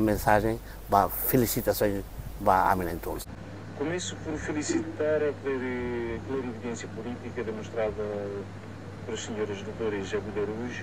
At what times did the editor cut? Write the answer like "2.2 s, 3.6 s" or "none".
3.3 s